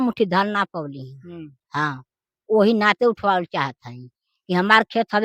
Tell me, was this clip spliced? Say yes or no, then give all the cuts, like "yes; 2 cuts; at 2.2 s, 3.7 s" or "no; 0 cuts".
no; 0 cuts